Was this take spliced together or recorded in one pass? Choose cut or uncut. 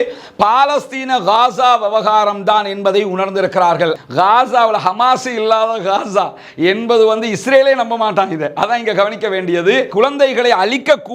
cut